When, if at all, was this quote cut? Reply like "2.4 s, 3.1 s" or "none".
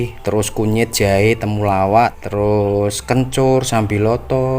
2.2 s